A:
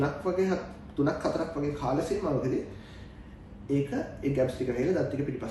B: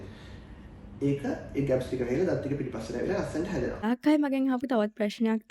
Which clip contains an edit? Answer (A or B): B